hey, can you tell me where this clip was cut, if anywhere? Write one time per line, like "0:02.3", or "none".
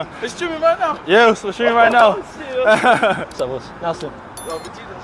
0:03.3